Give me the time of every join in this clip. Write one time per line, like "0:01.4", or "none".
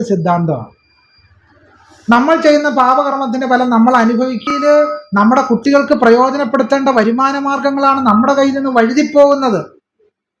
0:04.5